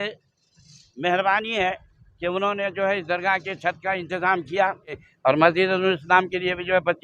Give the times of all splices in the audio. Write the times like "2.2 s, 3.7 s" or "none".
5.1 s